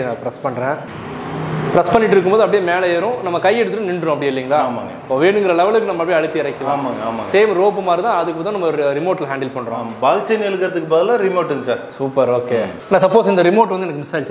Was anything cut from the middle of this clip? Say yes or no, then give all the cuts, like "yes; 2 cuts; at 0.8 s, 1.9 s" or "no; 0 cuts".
no; 0 cuts